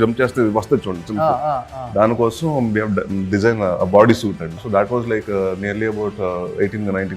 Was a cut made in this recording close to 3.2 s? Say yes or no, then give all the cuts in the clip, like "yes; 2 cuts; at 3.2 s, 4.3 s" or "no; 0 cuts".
no; 1 cut; at 4.6 s